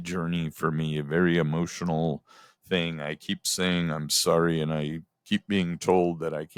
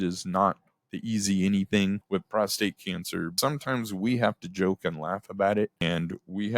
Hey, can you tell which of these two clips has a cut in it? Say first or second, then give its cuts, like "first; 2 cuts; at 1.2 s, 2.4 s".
second; 3 cuts; at 2.0 s, 3.4 s, 5.8 s